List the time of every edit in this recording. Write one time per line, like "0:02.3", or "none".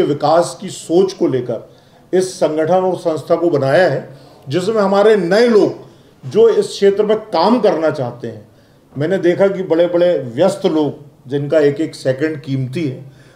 none